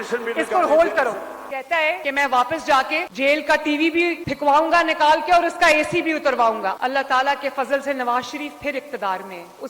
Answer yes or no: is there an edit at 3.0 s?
yes